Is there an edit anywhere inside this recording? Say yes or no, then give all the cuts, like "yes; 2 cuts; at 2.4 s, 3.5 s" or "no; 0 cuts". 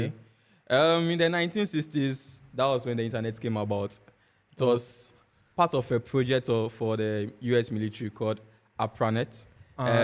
no; 0 cuts